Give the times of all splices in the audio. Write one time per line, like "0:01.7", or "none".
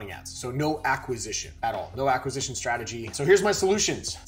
0:03.1